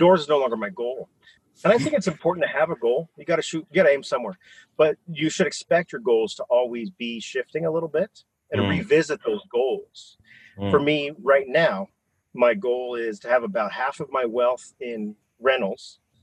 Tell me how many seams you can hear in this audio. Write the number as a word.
one